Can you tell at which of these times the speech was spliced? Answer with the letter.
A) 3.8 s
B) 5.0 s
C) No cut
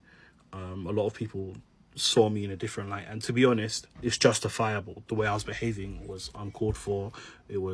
B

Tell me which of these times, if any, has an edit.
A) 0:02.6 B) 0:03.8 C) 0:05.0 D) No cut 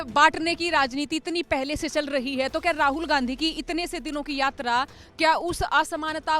D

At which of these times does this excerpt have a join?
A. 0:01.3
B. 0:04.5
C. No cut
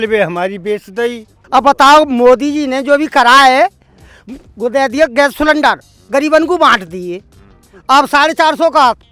A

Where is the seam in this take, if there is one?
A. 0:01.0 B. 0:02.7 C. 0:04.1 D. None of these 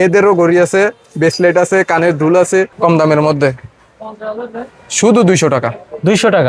B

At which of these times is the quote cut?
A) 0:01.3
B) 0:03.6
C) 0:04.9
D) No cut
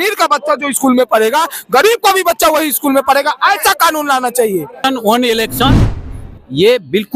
C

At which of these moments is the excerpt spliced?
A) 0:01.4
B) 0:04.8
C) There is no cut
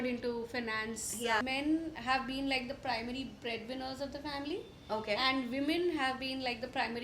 A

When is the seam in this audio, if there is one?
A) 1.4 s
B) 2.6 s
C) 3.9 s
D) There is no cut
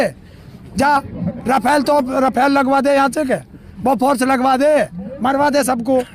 D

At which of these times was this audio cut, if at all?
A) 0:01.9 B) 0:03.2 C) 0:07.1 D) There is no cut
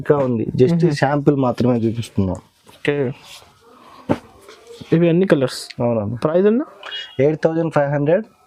D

